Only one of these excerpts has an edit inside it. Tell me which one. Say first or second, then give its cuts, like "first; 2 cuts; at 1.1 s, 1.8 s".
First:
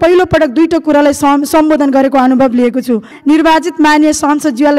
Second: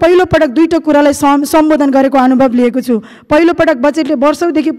first; 1 cut; at 3.1 s